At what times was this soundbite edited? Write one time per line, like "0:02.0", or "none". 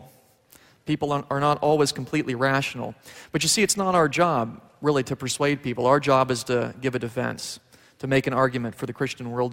none